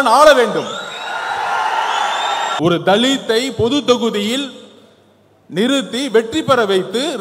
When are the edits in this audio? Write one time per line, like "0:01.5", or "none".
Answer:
0:02.5